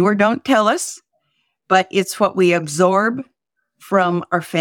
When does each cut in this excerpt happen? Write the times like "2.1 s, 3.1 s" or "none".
none